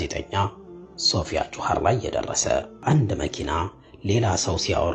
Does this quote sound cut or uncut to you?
cut